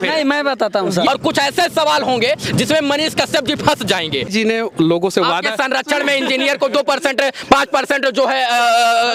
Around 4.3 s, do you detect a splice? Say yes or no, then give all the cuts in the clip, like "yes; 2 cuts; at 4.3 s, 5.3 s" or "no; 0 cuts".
yes; 2 cuts; at 1.1 s, 4.3 s